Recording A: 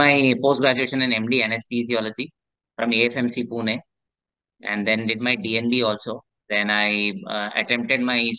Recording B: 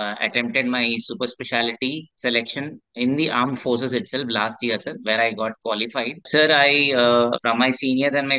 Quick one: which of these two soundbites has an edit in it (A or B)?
B